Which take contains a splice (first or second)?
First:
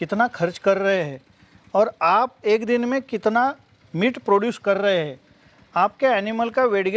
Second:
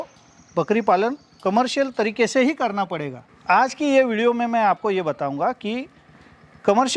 second